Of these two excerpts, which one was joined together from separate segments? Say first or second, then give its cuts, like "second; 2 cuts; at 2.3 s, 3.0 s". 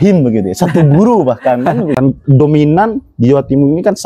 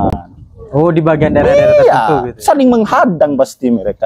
first; 1 cut; at 1.9 s